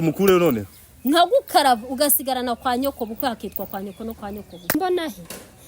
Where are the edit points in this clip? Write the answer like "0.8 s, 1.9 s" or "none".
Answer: 4.7 s